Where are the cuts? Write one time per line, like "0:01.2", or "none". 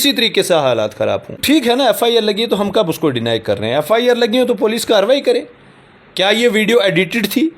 0:01.3